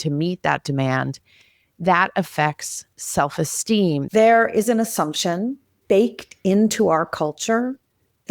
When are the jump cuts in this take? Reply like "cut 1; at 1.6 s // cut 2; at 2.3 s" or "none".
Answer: cut 1; at 4.1 s // cut 2; at 5.7 s